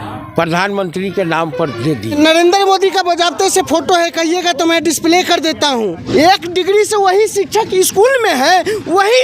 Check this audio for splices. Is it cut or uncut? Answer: cut